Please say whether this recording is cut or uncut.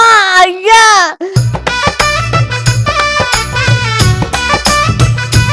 uncut